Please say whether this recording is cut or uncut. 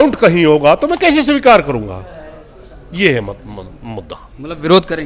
uncut